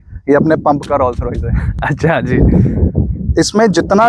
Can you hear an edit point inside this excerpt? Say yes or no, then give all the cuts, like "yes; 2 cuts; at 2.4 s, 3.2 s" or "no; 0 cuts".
no; 0 cuts